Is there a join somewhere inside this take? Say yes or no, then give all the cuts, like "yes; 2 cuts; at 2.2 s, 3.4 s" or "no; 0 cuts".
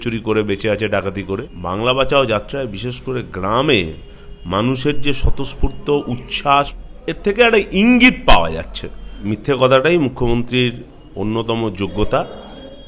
yes; 3 cuts; at 1.5 s, 6.8 s, 9.3 s